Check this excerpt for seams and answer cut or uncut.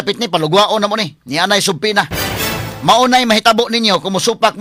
uncut